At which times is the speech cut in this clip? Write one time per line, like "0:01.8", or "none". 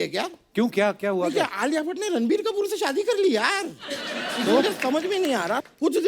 none

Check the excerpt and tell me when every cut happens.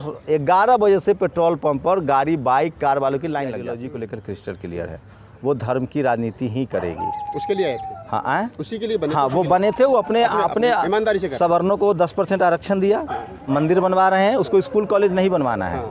0:03.8

